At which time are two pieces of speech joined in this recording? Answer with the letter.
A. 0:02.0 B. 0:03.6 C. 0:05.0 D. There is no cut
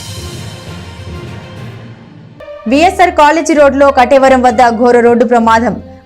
A